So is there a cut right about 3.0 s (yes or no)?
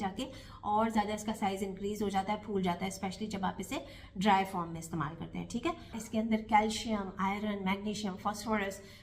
no